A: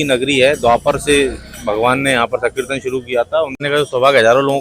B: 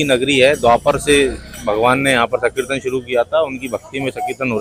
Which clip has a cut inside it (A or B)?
A